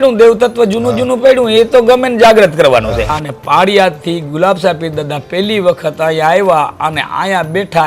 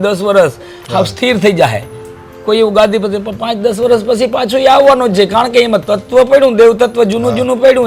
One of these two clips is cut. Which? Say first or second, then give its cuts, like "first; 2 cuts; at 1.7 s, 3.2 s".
first; 1 cut; at 3.2 s